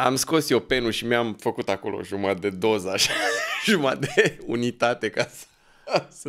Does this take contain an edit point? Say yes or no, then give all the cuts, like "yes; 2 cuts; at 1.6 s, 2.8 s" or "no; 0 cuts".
no; 0 cuts